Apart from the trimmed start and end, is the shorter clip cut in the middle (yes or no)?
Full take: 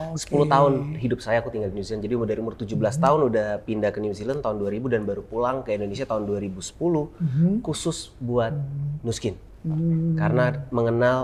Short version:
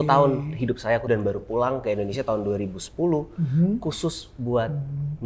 yes